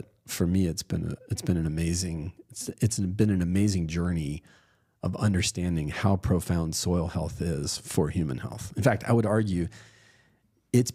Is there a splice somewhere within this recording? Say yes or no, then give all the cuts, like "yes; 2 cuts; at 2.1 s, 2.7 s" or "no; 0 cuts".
no; 0 cuts